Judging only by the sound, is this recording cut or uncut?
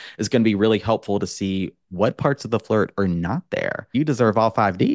cut